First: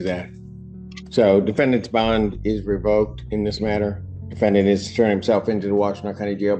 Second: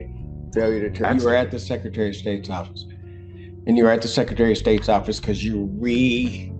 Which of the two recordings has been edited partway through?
second; 1 cut; at 1.0 s

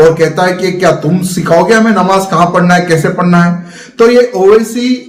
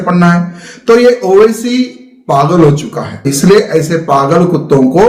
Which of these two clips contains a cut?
second; 1 cut; at 3.3 s

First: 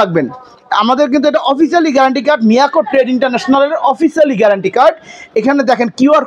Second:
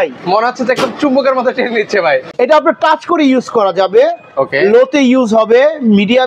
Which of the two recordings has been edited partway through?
second; 1 cut; at 2.3 s

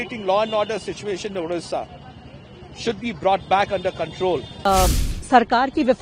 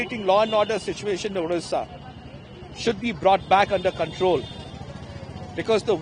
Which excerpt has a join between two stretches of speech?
first; 1 cut; at 4.7 s

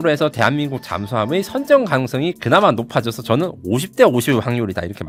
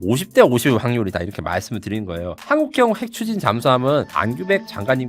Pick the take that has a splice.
second; 1 cut; at 2.5 s

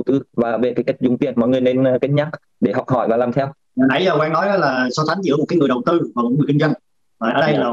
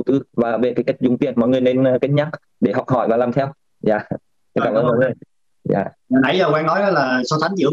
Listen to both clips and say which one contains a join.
first; 1 cut; at 3.6 s

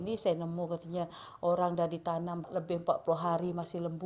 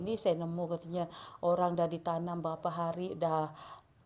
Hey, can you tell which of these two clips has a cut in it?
first; 1 cut; at 2.5 s

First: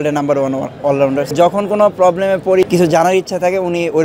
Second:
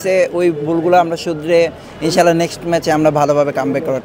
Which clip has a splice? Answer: first; 2 cuts; at 1.3 s, 2.6 s

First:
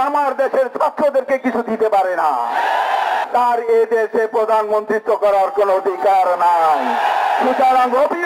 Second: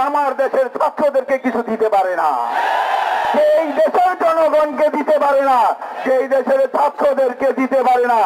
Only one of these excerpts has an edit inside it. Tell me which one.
first; 1 cut; at 3.2 s

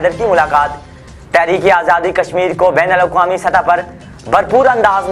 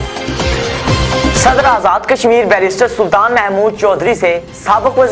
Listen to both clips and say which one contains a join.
second; 1 cut; at 1.4 s

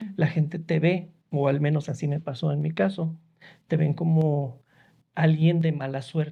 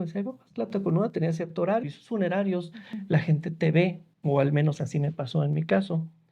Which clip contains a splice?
second; 1 cut; at 1.9 s

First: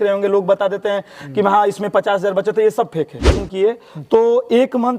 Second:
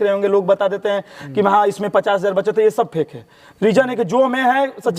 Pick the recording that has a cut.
first; 1 cut; at 3.4 s

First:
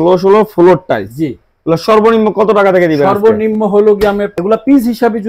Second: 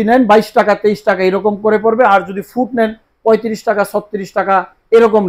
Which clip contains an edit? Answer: first; 1 cut; at 4.3 s

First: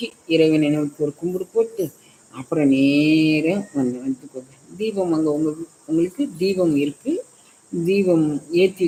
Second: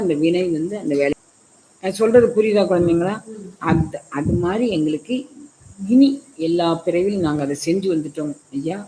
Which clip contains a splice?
second; 1 cut; at 1.1 s

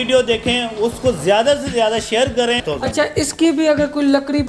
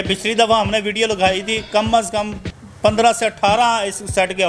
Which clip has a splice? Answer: first; 1 cut; at 2.6 s

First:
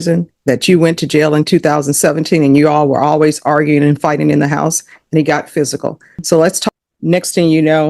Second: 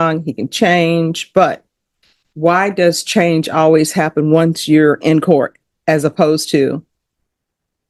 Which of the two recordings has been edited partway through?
first; 1 cut; at 6.6 s

